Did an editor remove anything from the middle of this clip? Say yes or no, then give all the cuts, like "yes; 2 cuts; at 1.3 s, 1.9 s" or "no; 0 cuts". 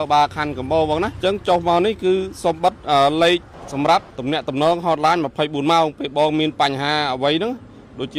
yes; 3 cuts; at 1.1 s, 3.6 s, 4.1 s